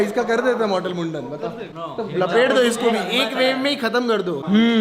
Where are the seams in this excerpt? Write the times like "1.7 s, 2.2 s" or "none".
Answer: none